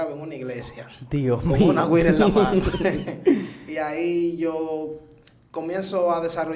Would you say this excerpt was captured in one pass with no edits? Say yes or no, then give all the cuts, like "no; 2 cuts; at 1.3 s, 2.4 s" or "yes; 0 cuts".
yes; 0 cuts